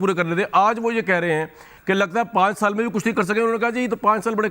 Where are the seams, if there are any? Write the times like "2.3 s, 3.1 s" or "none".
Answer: 1.7 s